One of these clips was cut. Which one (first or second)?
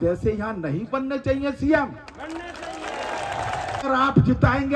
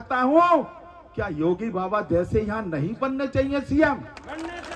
first